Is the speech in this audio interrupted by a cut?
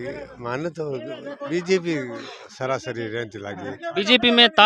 no; 0 cuts

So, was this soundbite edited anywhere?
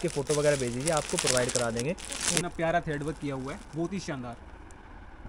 yes; 1 cut; at 2.4 s

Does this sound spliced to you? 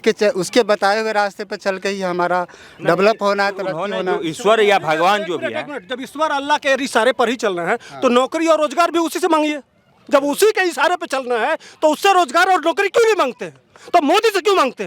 no; 0 cuts

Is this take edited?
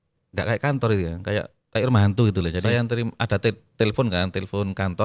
yes; 1 cut; at 2.6 s

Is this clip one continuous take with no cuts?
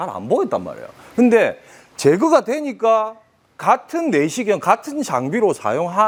yes; 0 cuts

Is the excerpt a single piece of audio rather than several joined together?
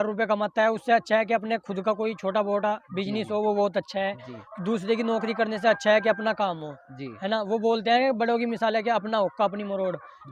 yes; 0 cuts

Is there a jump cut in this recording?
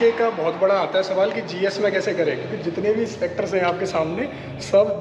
no; 0 cuts

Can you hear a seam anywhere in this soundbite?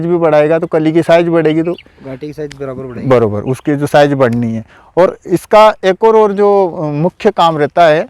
no; 0 cuts

